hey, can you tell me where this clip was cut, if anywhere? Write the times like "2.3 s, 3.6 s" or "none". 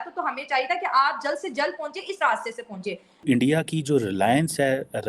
3.2 s